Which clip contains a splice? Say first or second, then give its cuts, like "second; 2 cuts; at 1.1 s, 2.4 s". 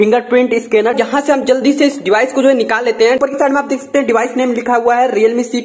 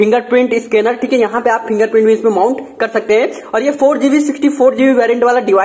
first; 2 cuts; at 0.9 s, 3.2 s